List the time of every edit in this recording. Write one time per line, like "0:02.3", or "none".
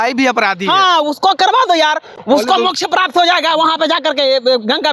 none